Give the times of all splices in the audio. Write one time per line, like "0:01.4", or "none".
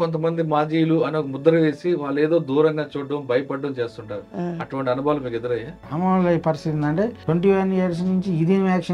0:05.8
0:07.2